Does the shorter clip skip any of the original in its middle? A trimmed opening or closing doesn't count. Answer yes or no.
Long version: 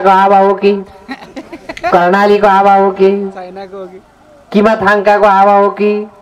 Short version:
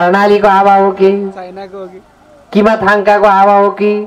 no